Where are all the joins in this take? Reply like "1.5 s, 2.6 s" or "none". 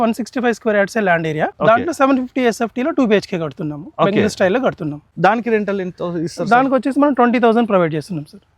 5.0 s

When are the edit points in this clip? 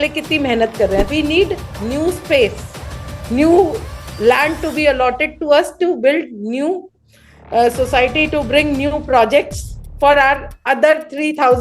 1.1 s

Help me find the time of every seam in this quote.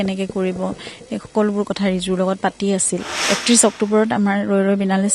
3.2 s

